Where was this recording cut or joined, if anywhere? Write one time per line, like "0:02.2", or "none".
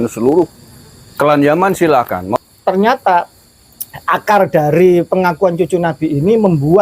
0:02.3

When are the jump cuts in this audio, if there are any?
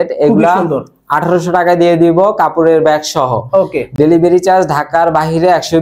none

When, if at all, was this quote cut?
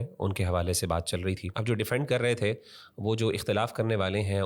0:01.5

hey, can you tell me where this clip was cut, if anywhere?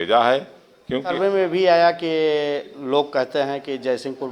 0:01.1

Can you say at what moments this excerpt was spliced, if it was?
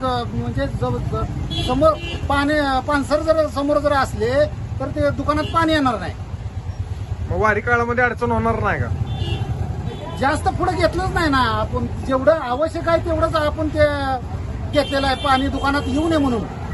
none

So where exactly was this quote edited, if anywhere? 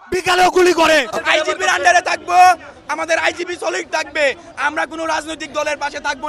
0:00.9

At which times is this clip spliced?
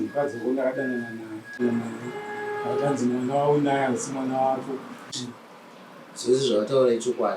0:01.6
0:05.2

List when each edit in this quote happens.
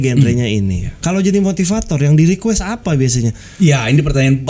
0:00.9
0:03.5

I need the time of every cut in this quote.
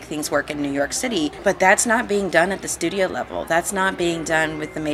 0:01.4

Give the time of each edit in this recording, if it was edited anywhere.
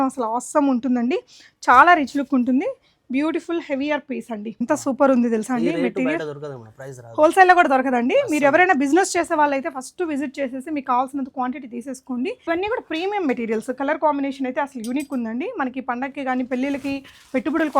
0:04.6
0:12.4

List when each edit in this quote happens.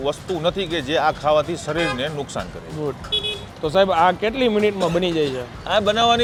none

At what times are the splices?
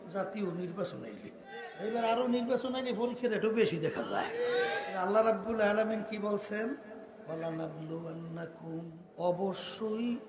0:01.7
0:04.8
0:09.0

